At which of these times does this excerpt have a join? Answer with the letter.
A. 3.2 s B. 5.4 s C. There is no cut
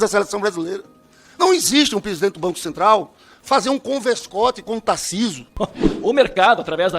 B